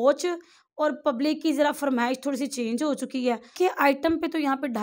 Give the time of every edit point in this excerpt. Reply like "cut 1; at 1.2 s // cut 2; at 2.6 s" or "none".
cut 1; at 3.5 s